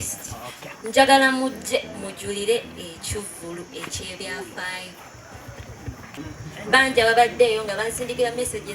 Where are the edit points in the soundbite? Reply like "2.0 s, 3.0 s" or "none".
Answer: 6.1 s